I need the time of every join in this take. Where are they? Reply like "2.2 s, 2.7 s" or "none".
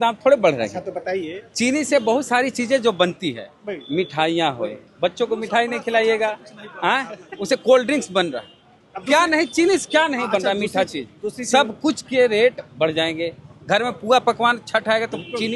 none